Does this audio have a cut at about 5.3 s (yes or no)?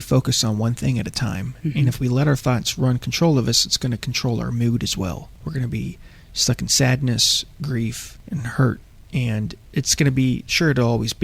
yes